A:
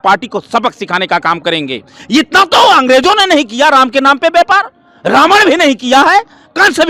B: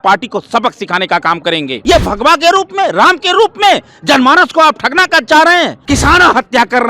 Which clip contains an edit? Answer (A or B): B